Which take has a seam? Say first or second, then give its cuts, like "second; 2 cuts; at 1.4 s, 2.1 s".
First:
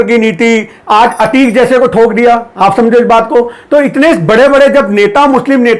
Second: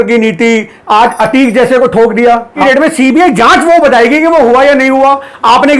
second; 1 cut; at 2.6 s